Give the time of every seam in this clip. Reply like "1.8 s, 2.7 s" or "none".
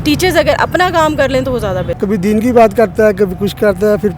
1.9 s